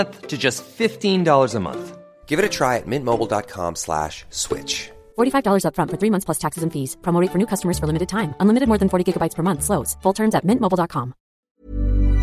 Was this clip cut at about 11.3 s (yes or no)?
yes